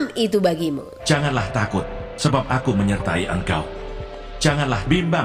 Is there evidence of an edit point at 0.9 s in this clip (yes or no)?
yes